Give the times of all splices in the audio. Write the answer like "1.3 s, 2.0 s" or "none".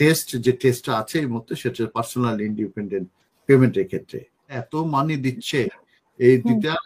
4.6 s